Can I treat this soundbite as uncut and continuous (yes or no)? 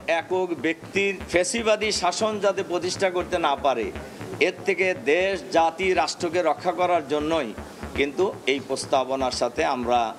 no